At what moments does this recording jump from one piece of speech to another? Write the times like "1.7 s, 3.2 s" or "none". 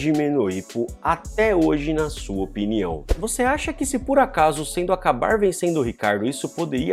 3.1 s